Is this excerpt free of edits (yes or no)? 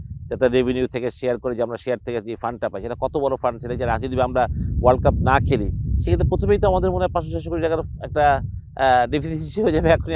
yes